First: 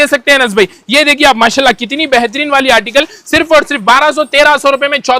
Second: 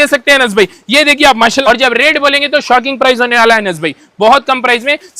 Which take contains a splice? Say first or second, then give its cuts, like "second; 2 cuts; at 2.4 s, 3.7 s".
second; 1 cut; at 1.6 s